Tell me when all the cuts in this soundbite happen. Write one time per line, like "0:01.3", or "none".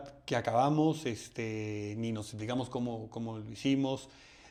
none